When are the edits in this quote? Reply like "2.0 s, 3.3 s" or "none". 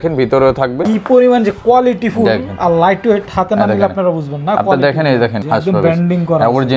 0.9 s, 5.4 s